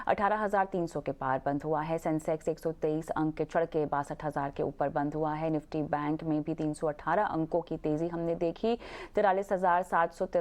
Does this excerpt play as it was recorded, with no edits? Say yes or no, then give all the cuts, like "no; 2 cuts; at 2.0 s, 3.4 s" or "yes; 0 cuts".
no; 1 cut; at 8.9 s